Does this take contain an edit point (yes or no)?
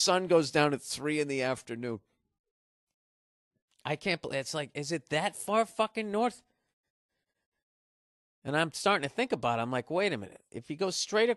yes